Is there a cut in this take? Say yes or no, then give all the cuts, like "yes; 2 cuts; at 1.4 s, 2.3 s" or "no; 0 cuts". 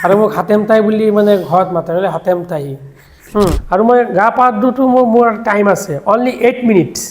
yes; 1 cut; at 3.6 s